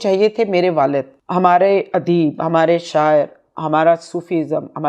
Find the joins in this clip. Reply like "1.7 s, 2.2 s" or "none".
1.2 s